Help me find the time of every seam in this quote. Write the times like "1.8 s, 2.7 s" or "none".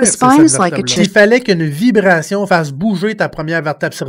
0.9 s